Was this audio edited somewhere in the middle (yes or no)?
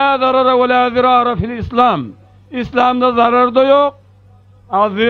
no